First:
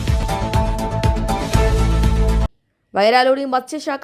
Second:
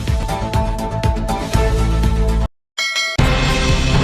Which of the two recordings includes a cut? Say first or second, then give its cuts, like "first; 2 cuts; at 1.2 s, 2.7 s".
second; 1 cut; at 2.9 s